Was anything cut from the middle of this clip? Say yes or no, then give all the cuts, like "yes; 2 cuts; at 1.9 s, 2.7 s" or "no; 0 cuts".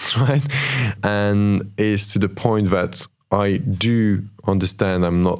yes; 1 cut; at 1.0 s